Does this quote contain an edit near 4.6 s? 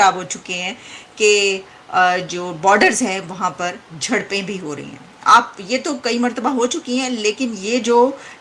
no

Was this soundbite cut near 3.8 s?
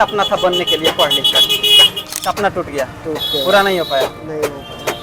no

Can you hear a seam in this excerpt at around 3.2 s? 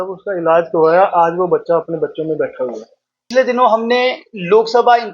yes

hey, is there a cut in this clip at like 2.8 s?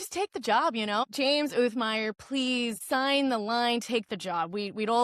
yes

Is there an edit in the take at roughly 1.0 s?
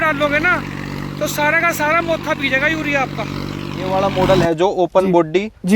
no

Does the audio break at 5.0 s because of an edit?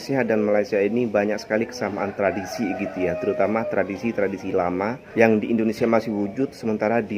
yes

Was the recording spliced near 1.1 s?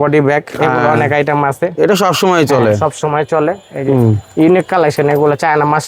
no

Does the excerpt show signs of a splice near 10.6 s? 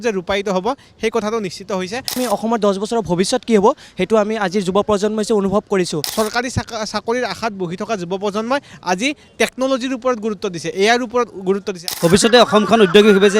no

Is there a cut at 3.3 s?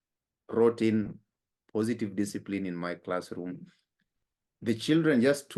no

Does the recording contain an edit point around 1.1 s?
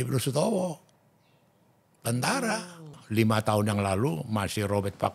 no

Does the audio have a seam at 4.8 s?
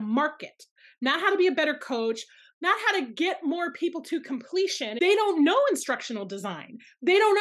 yes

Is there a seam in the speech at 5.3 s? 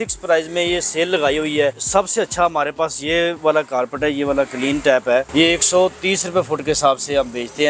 yes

